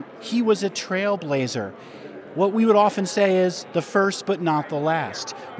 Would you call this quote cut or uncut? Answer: uncut